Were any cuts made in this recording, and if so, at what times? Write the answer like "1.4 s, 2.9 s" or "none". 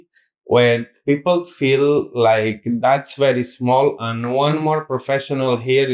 none